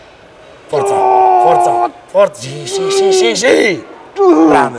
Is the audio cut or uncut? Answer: uncut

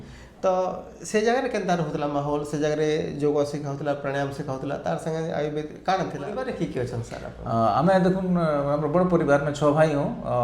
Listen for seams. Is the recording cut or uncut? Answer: cut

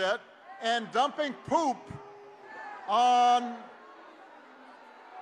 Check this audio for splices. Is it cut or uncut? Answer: uncut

